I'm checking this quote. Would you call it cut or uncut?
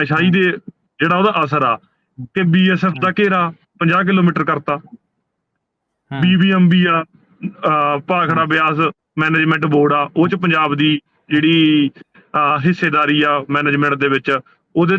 uncut